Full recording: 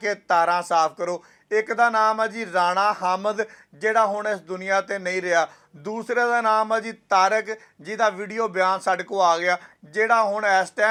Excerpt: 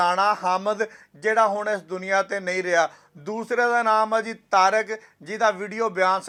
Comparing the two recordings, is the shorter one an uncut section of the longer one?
yes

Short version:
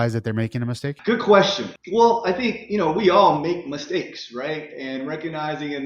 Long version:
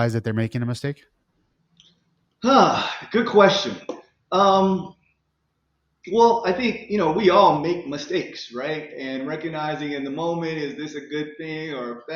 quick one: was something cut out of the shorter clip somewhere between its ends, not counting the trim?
yes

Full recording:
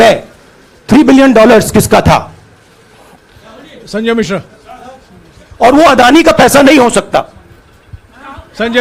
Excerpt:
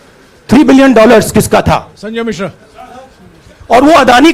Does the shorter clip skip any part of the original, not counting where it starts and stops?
yes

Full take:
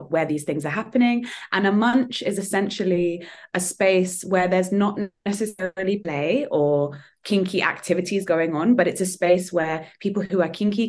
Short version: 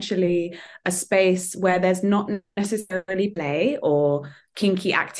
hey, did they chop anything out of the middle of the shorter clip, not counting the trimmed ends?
no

